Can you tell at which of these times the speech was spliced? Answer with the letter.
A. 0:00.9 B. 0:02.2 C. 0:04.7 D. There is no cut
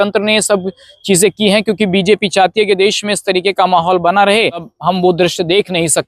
C